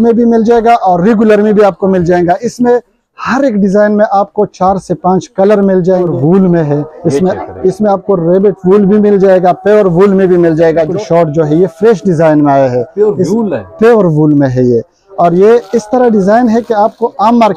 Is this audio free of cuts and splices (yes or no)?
no